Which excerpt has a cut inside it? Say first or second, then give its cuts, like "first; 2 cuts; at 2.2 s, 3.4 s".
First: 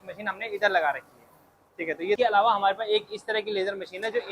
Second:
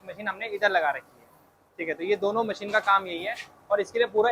first; 1 cut; at 2.2 s